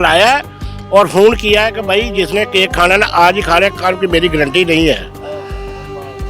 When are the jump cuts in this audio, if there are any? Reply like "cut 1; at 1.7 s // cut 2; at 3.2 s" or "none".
none